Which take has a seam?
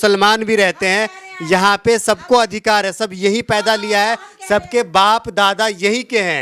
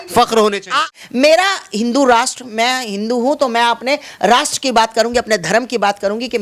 second; 1 cut; at 0.9 s

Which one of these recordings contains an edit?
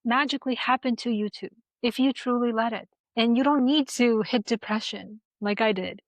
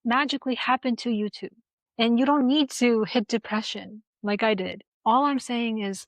second; 2 cuts; at 1.7 s, 4.8 s

